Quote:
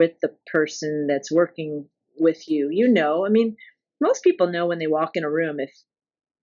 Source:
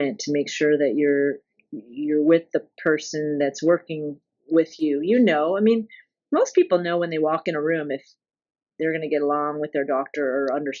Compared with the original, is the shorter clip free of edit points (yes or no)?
yes